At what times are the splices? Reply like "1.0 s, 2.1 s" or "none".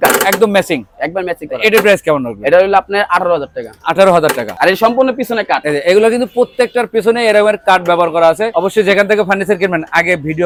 none